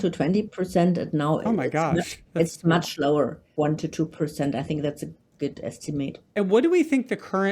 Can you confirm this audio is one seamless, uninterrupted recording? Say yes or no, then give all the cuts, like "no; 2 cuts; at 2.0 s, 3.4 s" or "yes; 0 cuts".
no; 2 cuts; at 3.4 s, 6.3 s